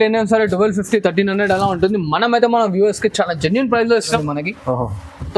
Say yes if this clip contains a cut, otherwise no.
yes